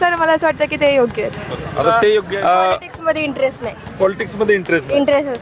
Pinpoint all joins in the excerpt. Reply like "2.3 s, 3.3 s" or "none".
2.3 s